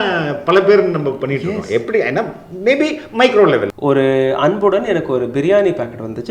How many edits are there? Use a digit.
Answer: 1